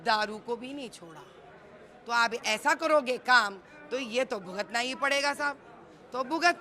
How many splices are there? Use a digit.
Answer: 0